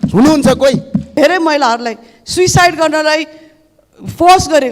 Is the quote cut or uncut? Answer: cut